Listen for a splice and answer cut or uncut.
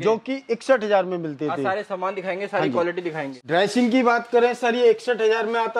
cut